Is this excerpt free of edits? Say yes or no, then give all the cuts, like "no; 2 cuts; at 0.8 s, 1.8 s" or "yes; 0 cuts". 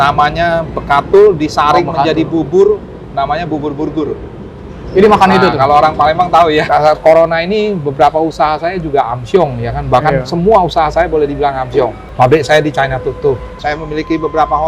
no; 3 cuts; at 6.7 s, 12.0 s, 13.6 s